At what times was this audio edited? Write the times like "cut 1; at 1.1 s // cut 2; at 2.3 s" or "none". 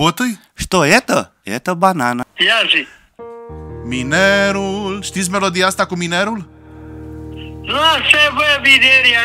cut 1; at 2.2 s